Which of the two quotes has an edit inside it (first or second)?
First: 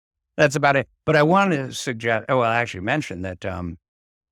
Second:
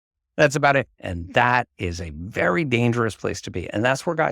second